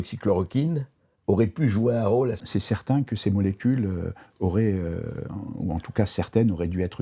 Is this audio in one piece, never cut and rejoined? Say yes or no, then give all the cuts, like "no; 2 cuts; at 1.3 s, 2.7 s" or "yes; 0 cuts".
no; 1 cut; at 2.4 s